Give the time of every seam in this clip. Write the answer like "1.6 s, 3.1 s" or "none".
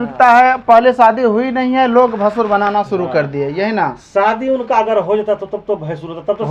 none